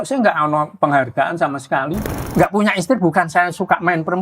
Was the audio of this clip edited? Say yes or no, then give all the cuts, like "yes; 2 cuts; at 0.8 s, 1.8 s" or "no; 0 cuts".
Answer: yes; 1 cut; at 2.1 s